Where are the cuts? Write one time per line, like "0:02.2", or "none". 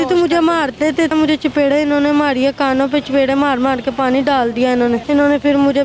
0:01.1
0:05.0